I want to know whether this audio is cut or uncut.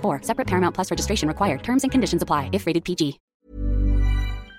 cut